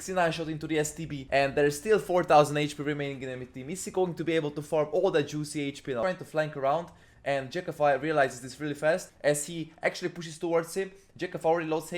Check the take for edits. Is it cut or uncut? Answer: cut